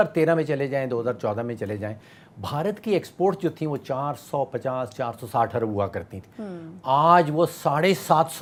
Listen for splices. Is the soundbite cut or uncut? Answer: uncut